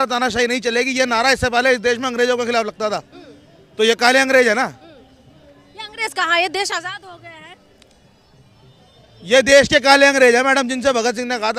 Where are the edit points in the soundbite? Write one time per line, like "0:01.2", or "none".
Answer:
none